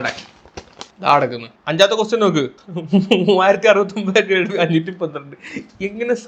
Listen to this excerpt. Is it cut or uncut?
cut